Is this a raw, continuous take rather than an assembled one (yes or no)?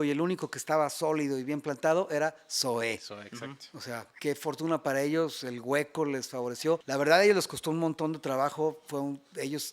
no